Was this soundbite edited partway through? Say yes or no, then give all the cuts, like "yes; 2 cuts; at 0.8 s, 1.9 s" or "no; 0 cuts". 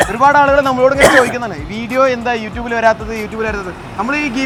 no; 0 cuts